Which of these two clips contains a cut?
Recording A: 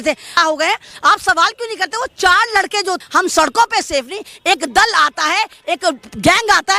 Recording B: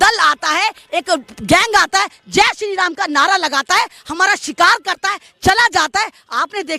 A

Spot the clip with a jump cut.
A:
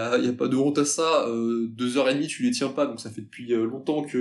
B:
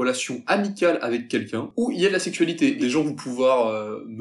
B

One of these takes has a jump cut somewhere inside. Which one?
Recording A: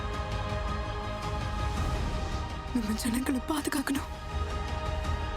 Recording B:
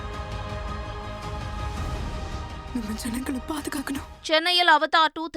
B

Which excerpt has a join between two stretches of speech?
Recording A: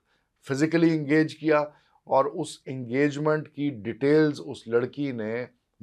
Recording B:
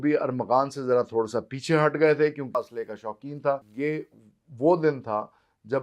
B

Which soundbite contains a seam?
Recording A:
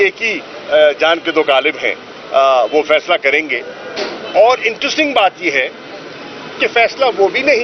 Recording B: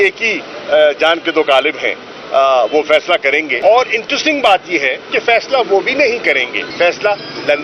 B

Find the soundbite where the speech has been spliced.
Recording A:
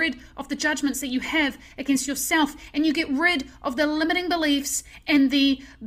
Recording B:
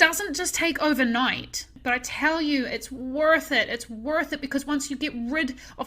B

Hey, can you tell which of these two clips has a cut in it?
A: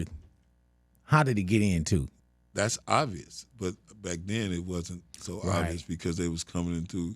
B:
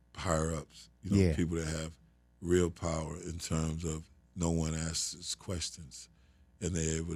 A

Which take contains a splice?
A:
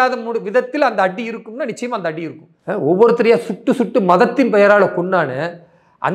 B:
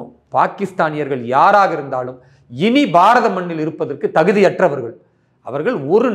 A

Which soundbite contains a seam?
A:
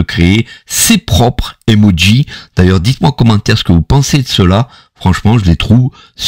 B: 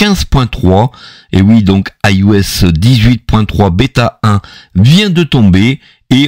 B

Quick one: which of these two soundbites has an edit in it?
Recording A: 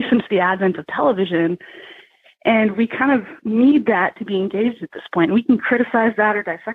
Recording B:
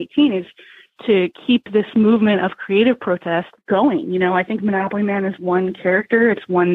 B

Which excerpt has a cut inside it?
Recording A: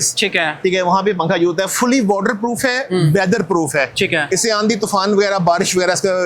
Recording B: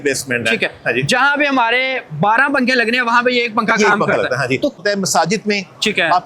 B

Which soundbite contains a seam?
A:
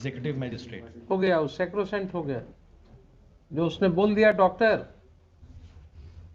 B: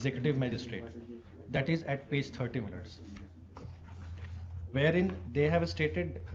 A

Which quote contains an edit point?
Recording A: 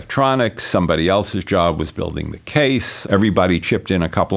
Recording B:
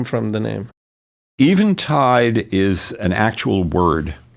A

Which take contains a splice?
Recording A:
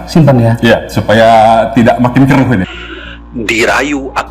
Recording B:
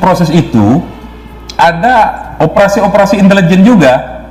A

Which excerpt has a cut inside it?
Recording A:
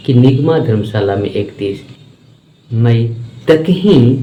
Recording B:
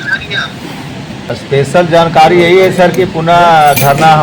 B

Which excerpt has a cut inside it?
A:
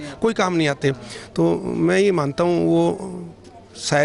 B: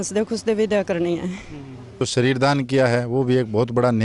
B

